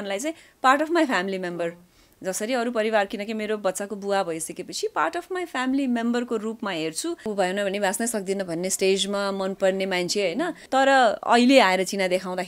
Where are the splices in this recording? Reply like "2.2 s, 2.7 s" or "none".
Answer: 7.3 s, 10.6 s